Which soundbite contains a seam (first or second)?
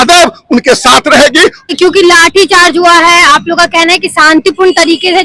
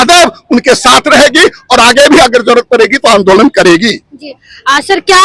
first